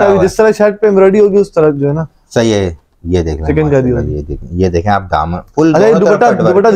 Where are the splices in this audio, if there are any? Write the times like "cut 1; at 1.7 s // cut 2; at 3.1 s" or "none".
none